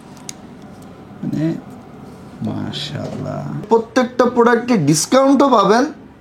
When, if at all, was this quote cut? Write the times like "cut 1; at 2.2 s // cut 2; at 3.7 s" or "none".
cut 1; at 3.7 s